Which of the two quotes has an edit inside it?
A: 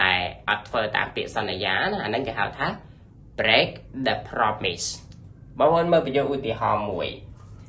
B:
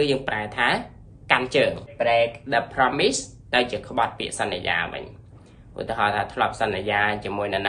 B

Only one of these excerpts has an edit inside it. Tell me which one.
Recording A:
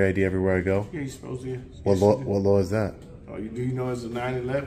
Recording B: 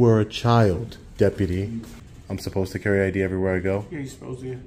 B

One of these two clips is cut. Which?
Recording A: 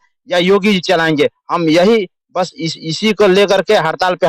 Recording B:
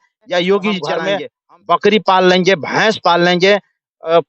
B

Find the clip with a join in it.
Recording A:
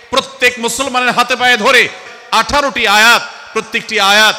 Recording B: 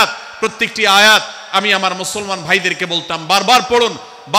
A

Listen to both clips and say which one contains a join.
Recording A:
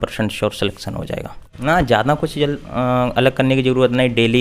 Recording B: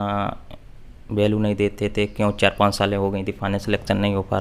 A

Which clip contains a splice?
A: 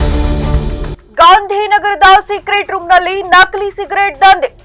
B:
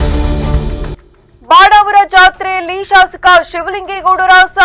A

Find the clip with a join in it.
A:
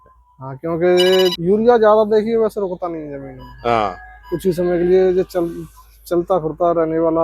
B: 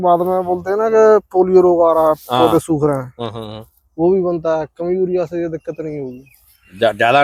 A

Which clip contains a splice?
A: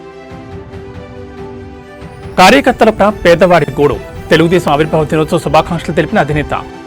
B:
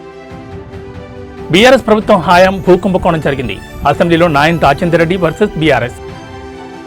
B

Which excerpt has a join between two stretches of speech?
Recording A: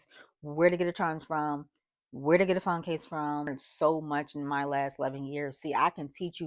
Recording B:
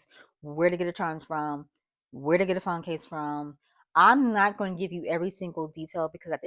A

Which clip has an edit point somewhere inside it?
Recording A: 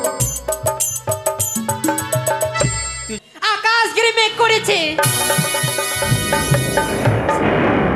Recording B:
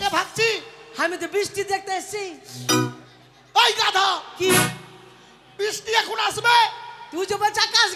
A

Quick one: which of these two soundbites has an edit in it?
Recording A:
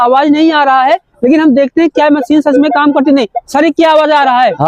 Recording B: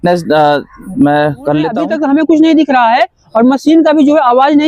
B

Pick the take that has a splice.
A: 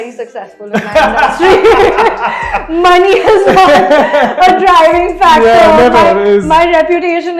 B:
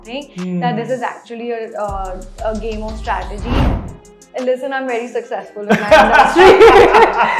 B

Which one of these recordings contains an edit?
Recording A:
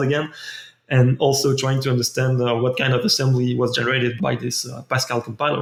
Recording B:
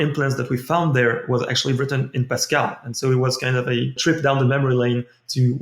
B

